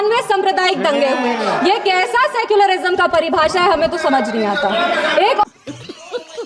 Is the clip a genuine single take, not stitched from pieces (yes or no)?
yes